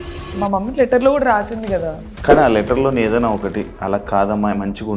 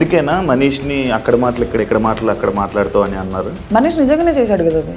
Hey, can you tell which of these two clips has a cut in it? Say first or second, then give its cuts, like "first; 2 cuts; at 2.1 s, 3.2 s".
first; 1 cut; at 2.0 s